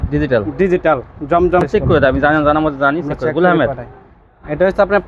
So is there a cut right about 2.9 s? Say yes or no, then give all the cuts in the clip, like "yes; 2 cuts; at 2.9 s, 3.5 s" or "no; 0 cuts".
no; 1 cut; at 1.6 s